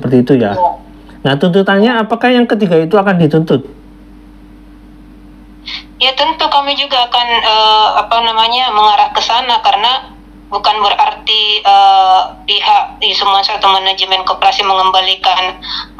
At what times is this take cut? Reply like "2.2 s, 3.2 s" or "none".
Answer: none